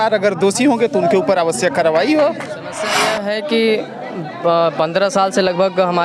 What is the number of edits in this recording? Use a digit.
1